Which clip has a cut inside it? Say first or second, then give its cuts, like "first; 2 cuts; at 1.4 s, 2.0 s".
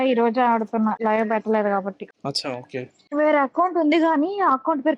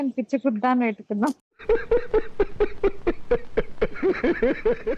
first; 1 cut; at 1.0 s